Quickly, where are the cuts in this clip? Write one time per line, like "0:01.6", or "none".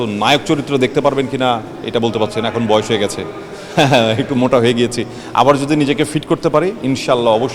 none

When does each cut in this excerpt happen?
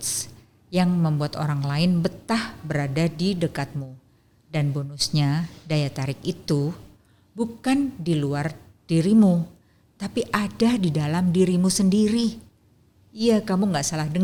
none

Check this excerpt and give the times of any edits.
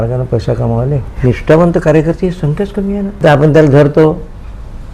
0:01.0
0:03.1

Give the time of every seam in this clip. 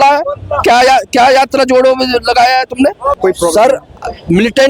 0:03.2

